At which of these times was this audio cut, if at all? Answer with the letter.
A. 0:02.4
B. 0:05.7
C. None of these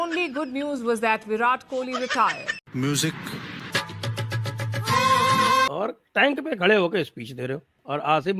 B